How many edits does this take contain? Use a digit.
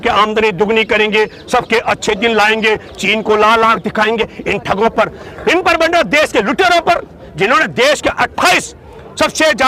0